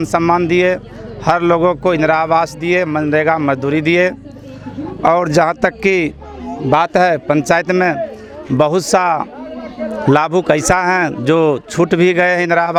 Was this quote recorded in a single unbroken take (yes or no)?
yes